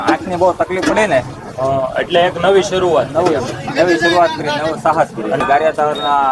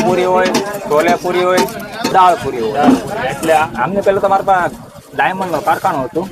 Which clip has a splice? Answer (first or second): second